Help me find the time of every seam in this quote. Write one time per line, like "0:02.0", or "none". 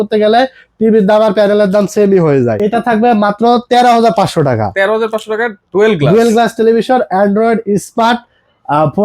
0:02.6

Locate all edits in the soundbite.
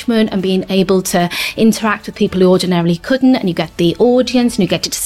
none

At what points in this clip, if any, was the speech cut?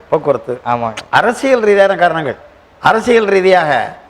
0:02.4

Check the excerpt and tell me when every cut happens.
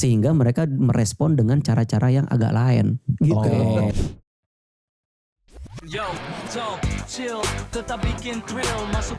0:03.9

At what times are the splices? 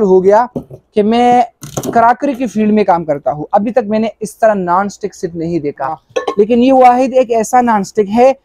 0:06.1

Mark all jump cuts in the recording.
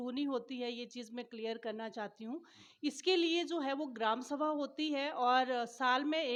none

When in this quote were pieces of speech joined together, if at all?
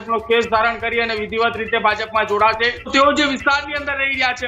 0:02.9

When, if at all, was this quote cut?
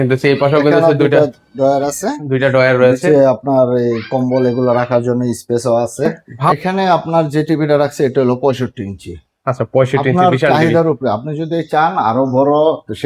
0:06.5

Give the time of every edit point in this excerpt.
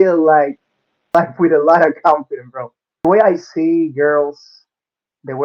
0:01.1
0:03.0

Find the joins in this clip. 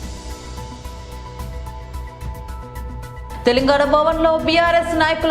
0:01.0

